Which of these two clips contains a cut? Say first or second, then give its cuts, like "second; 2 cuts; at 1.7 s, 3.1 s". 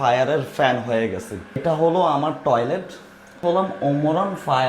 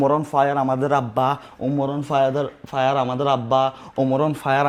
first; 1 cut; at 1.6 s